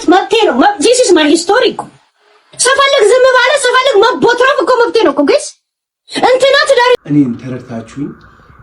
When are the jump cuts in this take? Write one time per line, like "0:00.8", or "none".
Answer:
0:07.0